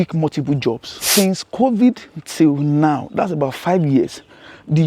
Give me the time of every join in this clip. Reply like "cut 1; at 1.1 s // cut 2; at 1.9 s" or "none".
cut 1; at 0.9 s